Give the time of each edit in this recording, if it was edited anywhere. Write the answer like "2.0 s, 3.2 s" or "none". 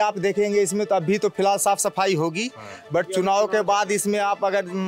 none